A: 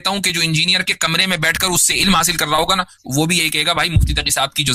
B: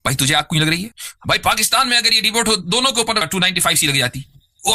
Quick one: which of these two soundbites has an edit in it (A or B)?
B